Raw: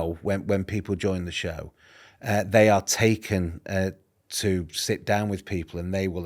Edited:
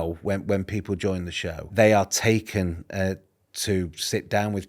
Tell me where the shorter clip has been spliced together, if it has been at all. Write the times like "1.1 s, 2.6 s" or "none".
1.7 s